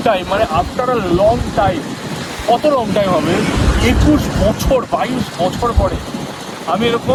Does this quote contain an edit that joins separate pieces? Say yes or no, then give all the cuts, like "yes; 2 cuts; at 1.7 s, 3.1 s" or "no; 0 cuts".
no; 0 cuts